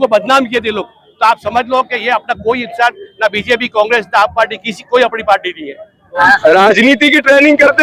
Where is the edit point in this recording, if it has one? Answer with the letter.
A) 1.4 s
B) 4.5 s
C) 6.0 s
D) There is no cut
C